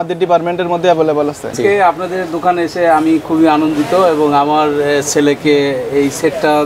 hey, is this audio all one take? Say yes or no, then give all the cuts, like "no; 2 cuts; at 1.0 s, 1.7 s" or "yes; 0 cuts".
no; 1 cut; at 1.5 s